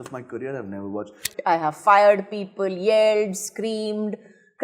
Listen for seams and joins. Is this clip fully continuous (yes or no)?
no